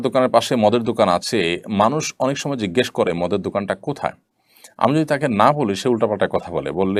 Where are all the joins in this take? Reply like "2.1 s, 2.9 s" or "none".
none